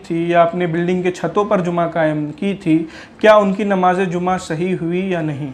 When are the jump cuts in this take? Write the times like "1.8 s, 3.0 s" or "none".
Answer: none

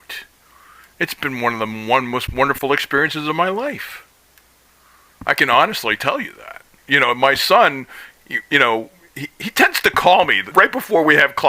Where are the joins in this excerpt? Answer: 6.8 s, 10.4 s

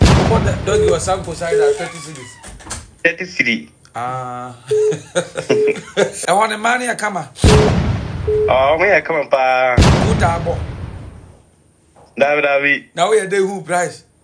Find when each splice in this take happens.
6.2 s

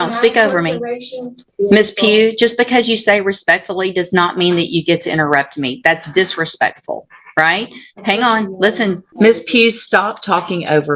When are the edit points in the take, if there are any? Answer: 1.4 s, 9.0 s

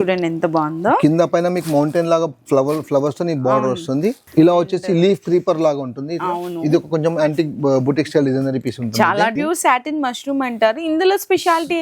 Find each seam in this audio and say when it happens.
4.2 s, 9.3 s

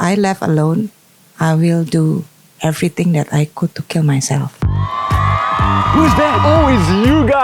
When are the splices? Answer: 4.6 s

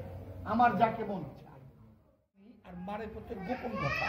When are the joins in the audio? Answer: 2.6 s

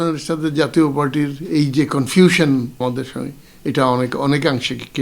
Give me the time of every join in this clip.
2.8 s

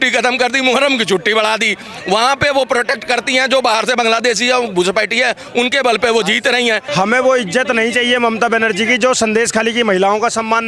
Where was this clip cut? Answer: 6.9 s

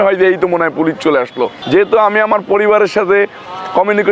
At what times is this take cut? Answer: 1.6 s

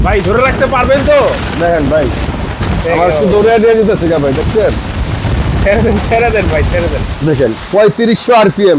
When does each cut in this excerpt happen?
none

